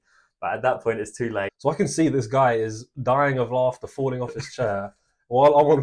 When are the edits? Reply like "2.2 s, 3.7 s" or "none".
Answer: 1.5 s